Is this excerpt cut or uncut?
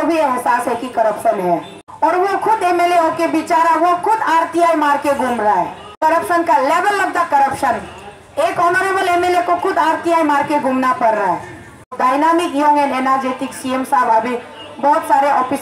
cut